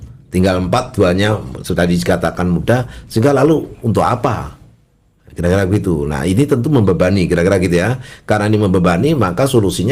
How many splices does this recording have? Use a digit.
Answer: 0